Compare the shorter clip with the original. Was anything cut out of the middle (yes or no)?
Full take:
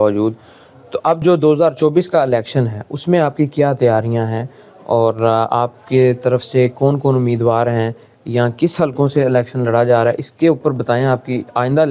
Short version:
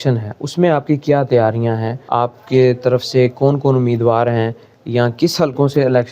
yes